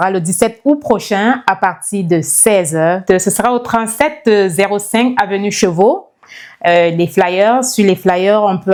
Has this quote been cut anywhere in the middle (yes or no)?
no